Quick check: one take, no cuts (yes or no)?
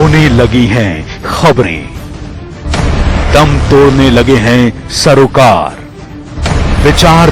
yes